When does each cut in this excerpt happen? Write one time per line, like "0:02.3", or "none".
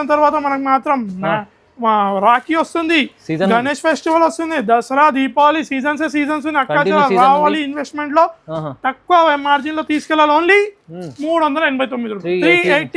none